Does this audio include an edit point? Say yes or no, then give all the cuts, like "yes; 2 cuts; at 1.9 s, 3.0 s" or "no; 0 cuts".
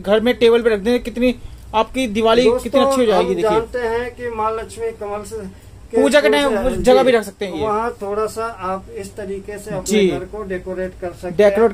no; 0 cuts